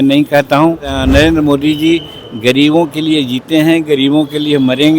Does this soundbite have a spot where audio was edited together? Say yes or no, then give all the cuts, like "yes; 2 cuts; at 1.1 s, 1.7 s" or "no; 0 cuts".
yes; 1 cut; at 0.9 s